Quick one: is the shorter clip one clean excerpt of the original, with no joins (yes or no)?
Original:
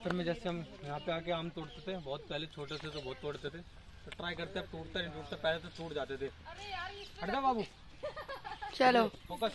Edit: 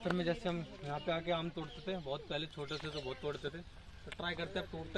yes